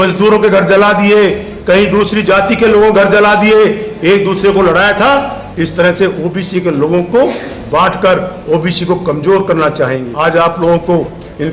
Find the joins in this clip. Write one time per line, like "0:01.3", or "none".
0:10.0